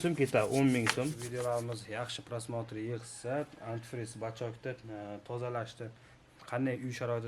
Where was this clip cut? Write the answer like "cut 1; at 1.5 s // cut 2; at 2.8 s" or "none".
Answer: cut 1; at 1.2 s